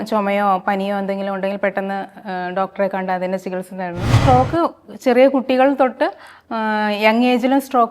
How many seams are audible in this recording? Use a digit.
1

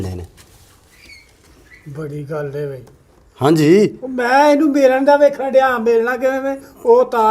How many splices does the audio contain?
0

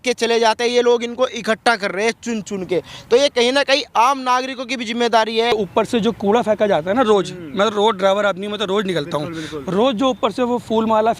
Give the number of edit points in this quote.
1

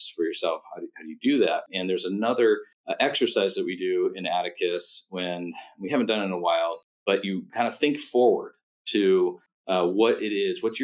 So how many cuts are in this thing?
4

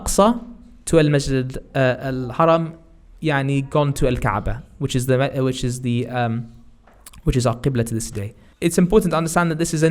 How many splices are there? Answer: 0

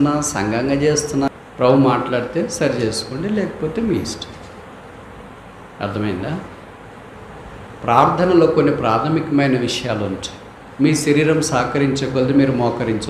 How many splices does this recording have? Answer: 1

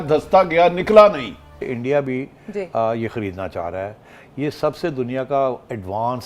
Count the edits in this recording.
1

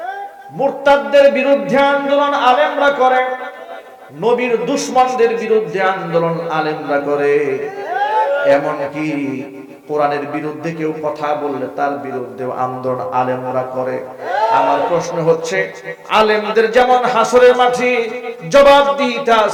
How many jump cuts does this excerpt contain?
0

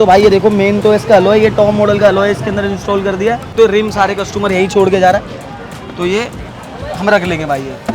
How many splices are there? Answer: 1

